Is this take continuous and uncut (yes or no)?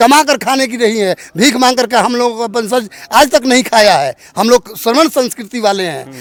yes